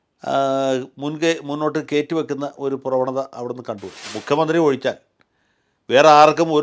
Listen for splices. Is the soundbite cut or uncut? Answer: cut